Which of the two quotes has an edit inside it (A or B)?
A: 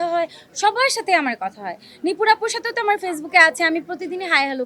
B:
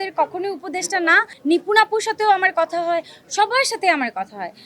B